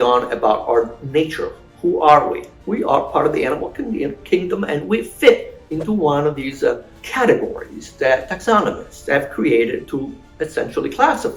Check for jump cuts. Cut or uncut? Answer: uncut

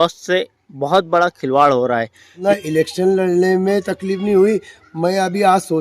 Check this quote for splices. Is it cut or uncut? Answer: cut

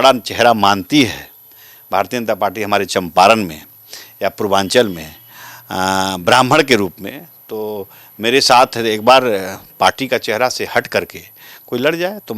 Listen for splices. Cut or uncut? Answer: uncut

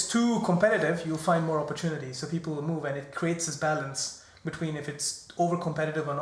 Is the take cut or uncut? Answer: uncut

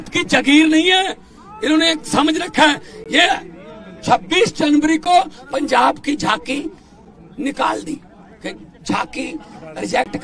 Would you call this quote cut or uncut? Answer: uncut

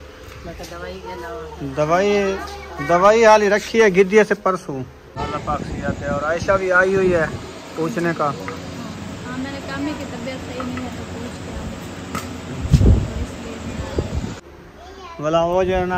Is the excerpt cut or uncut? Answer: cut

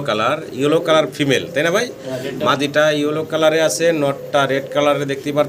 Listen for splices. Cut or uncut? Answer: uncut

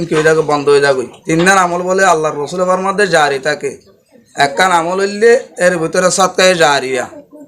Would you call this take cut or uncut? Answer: cut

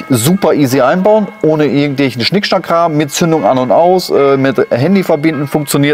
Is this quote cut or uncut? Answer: uncut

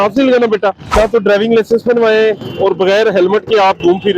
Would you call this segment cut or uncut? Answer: cut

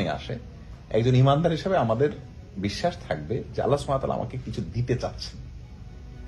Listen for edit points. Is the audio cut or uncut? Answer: uncut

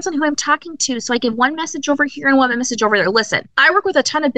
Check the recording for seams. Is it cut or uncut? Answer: cut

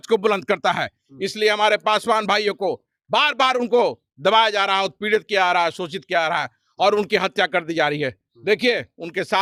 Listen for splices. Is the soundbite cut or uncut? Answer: uncut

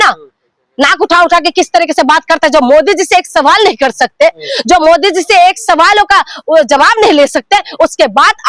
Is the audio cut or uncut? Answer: uncut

